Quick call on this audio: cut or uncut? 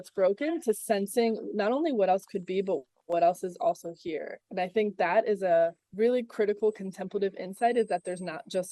cut